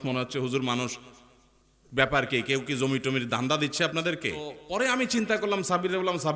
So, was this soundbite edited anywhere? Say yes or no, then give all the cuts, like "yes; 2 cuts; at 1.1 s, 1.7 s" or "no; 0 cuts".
yes; 1 cut; at 4.6 s